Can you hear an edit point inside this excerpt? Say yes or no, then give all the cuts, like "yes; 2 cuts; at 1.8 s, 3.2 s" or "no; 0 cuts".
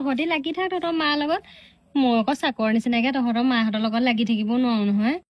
no; 0 cuts